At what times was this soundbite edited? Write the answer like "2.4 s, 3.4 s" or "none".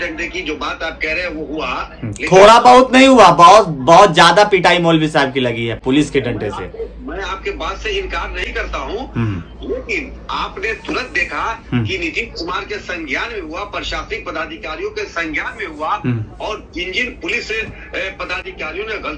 none